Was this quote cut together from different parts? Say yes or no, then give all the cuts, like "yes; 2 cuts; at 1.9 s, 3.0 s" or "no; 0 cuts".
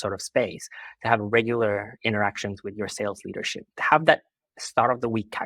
yes; 1 cut; at 3.6 s